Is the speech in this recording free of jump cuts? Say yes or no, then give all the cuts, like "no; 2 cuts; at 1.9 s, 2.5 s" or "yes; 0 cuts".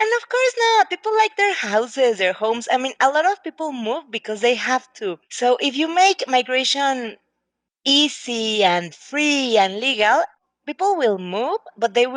yes; 0 cuts